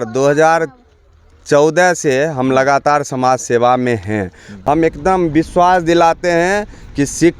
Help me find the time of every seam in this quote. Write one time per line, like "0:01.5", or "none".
0:04.5